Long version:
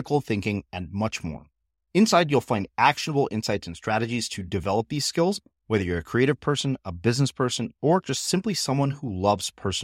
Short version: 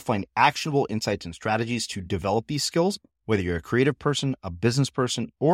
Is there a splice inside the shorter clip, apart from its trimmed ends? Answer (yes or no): no